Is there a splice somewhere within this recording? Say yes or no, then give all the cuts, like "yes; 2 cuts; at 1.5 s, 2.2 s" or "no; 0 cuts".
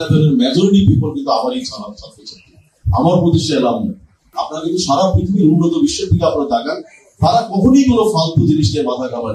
yes; 1 cut; at 4.3 s